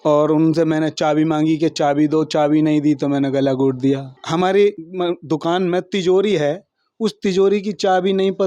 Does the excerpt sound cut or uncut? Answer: cut